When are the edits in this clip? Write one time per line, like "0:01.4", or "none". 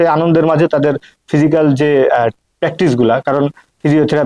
none